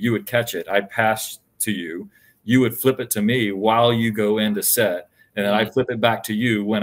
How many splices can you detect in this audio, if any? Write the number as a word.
zero